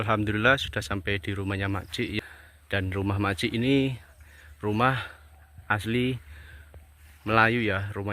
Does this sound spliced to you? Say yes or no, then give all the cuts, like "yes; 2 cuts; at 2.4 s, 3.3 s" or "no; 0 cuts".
yes; 1 cut; at 2.2 s